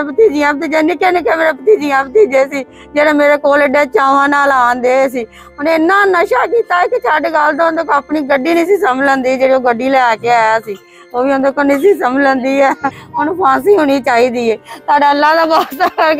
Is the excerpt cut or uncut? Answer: cut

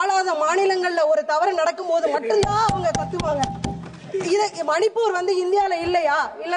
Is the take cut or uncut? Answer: uncut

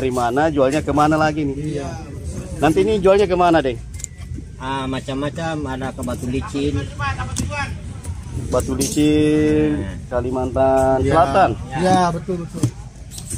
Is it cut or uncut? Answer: uncut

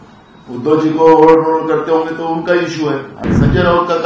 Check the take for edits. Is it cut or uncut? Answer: cut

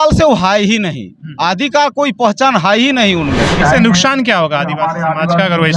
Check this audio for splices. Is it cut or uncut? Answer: cut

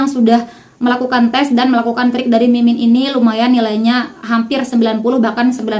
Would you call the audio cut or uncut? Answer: uncut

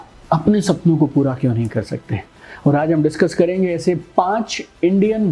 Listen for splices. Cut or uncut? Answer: uncut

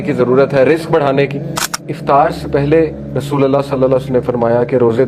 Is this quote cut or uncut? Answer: cut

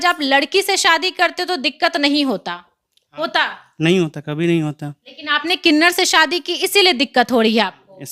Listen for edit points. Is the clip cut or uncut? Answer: uncut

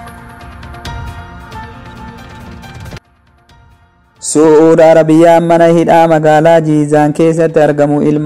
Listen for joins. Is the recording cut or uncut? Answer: uncut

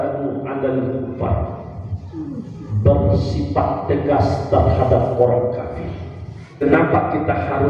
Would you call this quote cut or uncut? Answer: cut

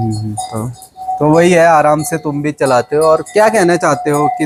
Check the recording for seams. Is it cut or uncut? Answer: uncut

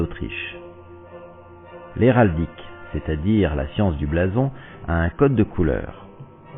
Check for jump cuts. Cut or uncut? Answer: uncut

